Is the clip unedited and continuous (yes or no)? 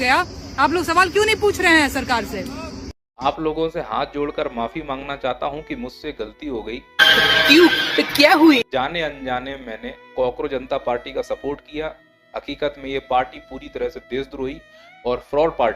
no